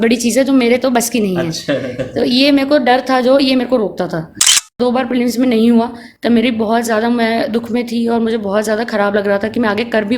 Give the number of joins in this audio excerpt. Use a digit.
1